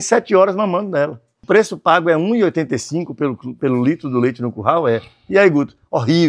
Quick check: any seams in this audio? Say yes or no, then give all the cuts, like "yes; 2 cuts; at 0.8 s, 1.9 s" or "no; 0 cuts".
yes; 1 cut; at 1.3 s